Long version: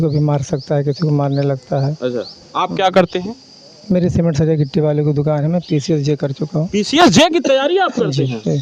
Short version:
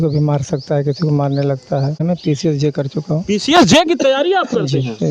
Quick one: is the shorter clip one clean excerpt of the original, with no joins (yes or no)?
no